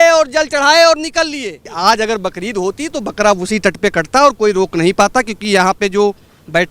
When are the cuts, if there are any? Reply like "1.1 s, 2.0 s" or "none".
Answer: 1.6 s

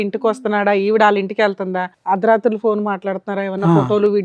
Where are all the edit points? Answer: 1.8 s

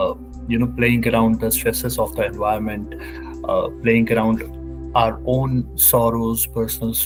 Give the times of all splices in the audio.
none

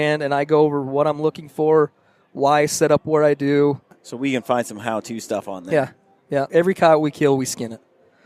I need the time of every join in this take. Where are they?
3.9 s, 6.5 s

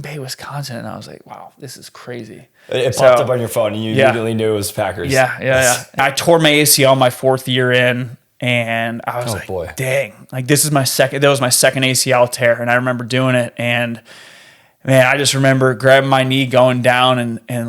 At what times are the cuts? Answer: 6.0 s

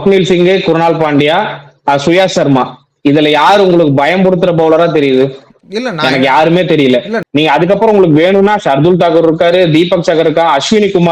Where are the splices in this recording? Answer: 7.2 s

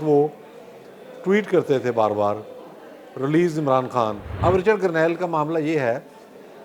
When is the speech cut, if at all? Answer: 4.3 s

